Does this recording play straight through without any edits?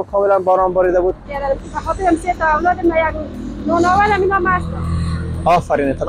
no; 1 cut; at 1.3 s

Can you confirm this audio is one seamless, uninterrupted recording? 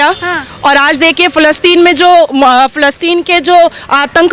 yes; 0 cuts

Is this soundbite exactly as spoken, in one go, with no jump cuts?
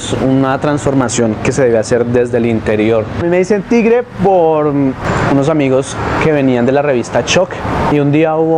yes; 0 cuts

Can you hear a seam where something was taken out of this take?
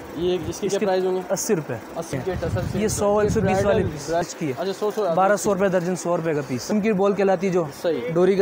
yes; 3 cuts; at 2.1 s, 4.2 s, 6.7 s

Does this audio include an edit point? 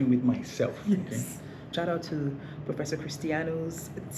yes; 1 cut; at 1.7 s

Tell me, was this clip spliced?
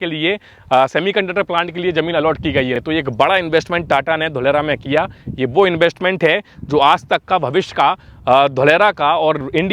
no; 0 cuts

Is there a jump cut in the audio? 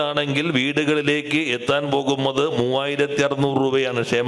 no; 0 cuts

